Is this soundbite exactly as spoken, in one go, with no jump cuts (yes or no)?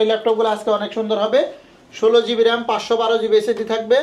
yes